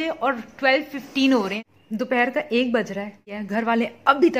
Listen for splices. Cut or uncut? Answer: cut